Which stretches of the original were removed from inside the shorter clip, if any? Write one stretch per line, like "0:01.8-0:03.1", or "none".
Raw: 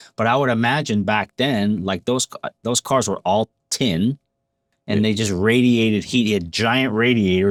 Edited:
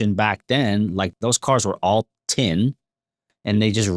0:02.0-0:02.5